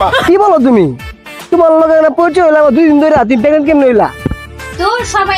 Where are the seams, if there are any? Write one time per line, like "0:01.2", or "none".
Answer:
none